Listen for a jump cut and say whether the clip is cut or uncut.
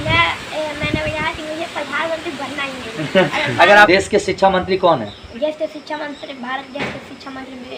cut